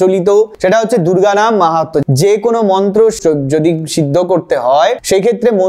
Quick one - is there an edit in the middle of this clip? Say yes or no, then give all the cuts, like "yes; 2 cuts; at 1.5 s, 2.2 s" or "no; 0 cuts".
yes; 2 cuts; at 2.0 s, 3.2 s